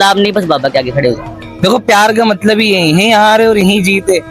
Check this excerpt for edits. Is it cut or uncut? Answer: cut